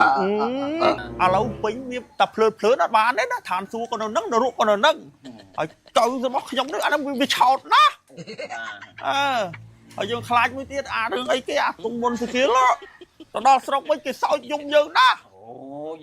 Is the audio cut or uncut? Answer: cut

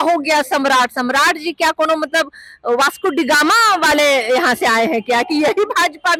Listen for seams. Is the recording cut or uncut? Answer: uncut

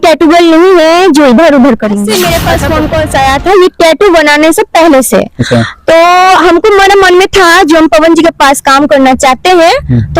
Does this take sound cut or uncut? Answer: cut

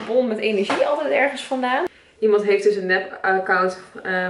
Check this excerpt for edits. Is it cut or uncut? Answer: cut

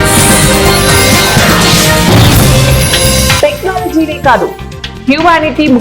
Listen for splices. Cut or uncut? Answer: cut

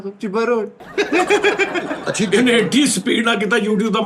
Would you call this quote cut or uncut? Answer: cut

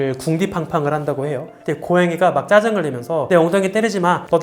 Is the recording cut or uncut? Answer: uncut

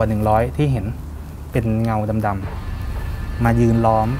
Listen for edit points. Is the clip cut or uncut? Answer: uncut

